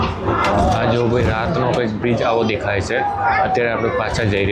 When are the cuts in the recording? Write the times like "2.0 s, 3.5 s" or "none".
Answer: none